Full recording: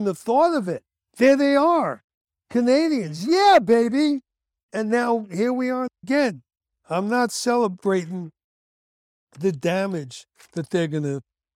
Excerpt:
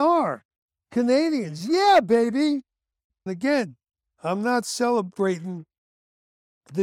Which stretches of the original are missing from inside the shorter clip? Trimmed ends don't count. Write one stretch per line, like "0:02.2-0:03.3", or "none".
0:04.8-0:05.8